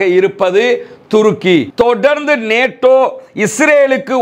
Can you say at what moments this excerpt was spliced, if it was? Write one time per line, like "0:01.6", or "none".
0:01.7